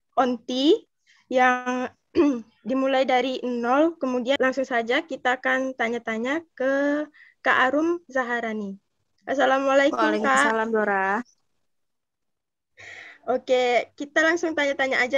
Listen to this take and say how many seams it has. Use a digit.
1